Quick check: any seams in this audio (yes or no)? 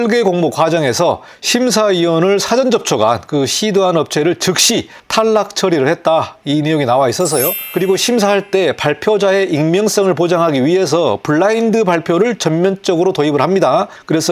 yes